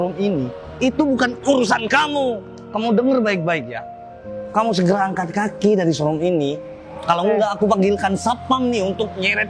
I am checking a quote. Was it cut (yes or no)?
no